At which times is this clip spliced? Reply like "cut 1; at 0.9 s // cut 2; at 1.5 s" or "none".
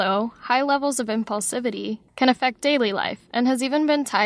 cut 1; at 2.0 s